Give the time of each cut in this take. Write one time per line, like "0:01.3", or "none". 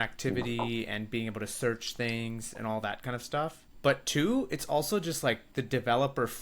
0:03.7
0:05.5